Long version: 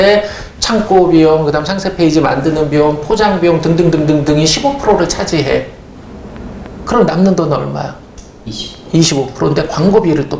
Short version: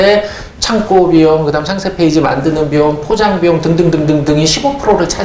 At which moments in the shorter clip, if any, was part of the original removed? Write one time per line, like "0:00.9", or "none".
none